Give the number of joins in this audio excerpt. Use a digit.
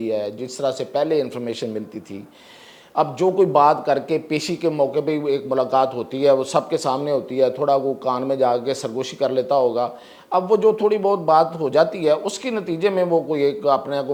0